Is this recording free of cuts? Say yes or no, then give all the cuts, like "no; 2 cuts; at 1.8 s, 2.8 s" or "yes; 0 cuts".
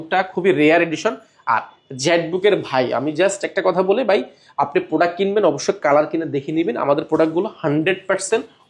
yes; 0 cuts